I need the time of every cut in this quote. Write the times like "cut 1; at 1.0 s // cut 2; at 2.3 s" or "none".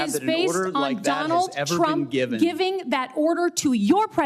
none